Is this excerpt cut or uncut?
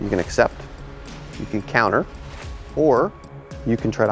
uncut